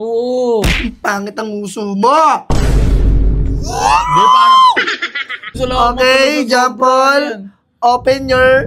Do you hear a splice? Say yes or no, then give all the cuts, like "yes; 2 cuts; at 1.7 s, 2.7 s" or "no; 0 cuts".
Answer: yes; 1 cut; at 5.4 s